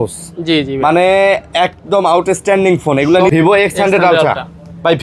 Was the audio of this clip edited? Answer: yes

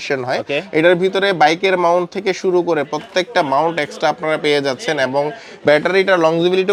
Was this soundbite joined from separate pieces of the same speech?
no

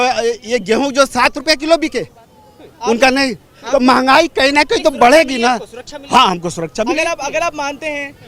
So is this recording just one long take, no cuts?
yes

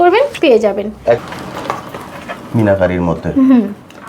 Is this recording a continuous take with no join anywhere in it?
no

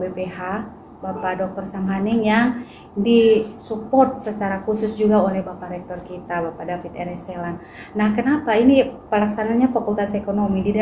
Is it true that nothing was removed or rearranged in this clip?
yes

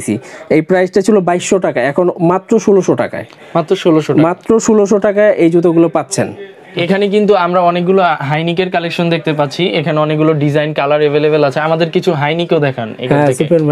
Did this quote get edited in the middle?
no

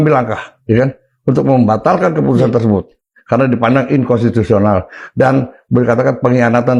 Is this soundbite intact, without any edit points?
yes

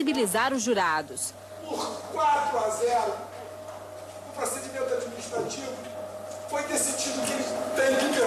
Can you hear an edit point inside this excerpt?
yes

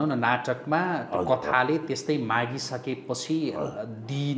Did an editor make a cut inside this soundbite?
no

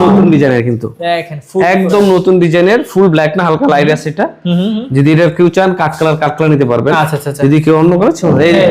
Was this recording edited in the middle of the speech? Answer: no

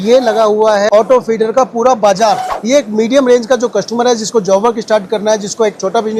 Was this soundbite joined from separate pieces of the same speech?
yes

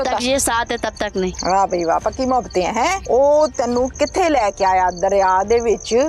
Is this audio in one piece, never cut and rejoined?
no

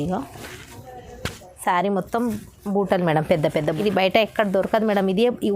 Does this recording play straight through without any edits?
no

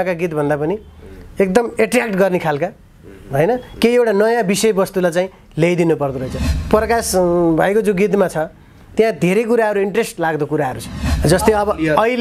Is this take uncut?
no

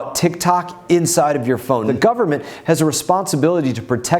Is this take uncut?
no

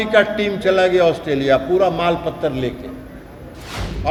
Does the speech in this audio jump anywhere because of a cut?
no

